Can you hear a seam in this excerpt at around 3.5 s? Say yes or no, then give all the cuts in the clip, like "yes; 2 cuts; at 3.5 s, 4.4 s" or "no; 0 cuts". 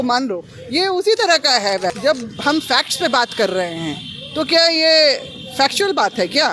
no; 1 cut; at 1.9 s